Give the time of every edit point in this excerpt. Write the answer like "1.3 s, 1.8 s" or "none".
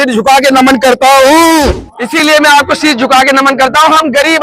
1.9 s